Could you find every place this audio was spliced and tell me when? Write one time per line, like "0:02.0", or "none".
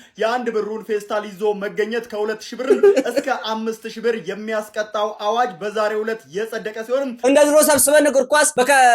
0:07.2